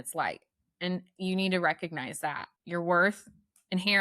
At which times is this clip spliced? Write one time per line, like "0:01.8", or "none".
0:02.5